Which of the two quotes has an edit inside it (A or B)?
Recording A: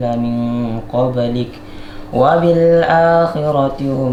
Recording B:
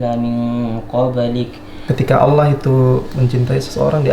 B